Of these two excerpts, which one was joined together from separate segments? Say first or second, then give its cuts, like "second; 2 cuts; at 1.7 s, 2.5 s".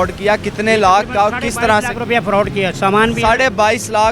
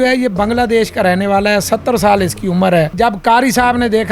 second; 1 cut; at 2.9 s